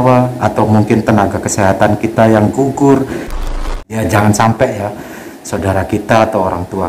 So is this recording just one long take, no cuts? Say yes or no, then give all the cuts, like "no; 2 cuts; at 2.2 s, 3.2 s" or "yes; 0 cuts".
no; 1 cut; at 3.5 s